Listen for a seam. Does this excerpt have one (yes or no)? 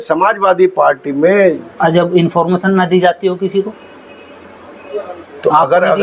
yes